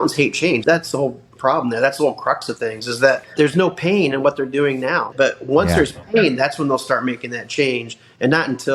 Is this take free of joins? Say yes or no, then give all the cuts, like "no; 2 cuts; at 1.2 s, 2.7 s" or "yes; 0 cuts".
no; 2 cuts; at 3.3 s, 5.1 s